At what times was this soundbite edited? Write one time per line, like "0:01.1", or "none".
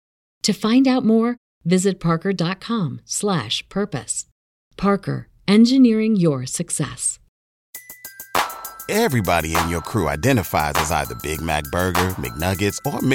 0:07.6